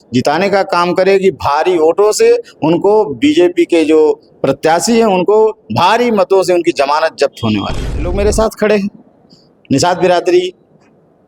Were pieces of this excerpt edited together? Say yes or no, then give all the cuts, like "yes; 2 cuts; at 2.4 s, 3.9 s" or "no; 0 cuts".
yes; 1 cut; at 8.0 s